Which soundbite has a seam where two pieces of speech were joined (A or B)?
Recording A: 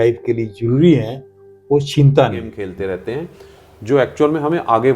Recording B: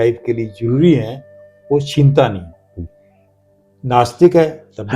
A